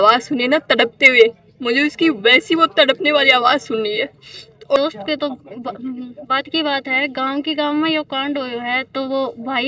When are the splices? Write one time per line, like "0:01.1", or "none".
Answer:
0:04.8

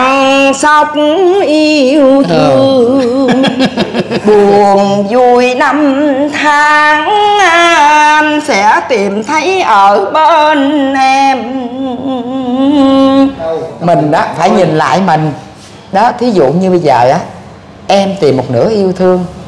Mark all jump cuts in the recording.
0:13.5

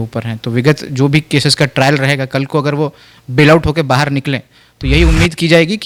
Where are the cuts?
none

